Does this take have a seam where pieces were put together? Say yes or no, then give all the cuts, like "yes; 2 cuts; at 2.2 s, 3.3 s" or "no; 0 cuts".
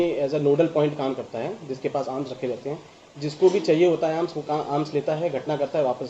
no; 0 cuts